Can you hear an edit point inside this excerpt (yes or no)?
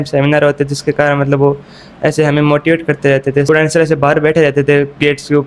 yes